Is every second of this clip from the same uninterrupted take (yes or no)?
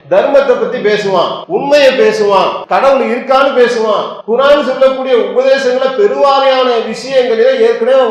no